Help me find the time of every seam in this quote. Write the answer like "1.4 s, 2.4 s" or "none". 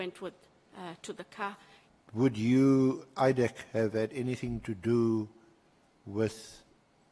1.7 s